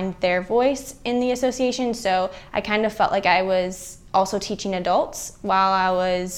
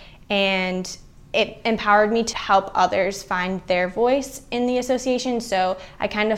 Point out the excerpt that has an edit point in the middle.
second; 1 cut; at 2.3 s

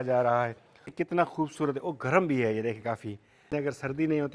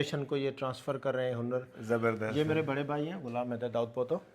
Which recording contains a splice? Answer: first; 2 cuts; at 0.9 s, 3.5 s

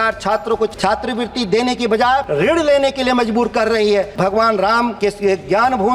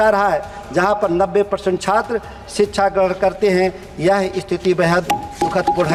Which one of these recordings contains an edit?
first; 4 cuts; at 0.7 s, 2.3 s, 4.1 s, 4.9 s

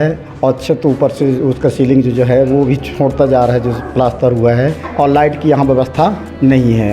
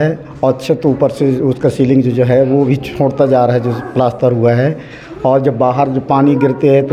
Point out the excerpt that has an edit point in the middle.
first; 1 cut; at 4.8 s

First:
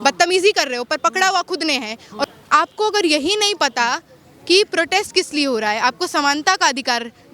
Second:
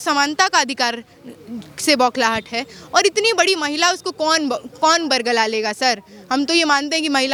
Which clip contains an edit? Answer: first; 1 cut; at 2.3 s

